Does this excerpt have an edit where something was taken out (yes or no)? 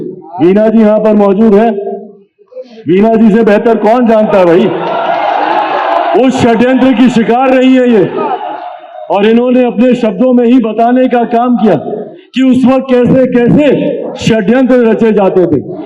no